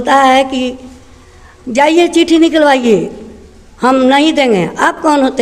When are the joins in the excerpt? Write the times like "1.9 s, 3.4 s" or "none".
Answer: none